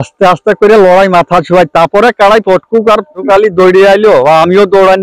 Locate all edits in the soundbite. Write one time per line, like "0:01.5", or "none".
0:03.2